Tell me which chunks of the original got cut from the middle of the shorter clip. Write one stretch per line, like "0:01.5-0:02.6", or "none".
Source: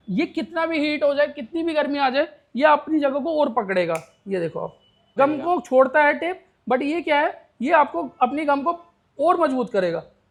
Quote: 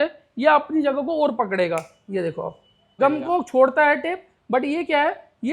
none